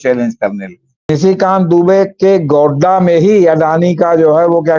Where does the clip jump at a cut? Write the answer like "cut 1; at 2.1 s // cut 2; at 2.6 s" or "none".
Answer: cut 1; at 1.1 s